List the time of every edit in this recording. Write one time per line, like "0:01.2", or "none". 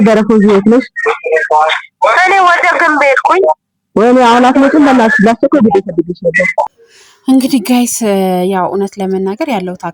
0:06.7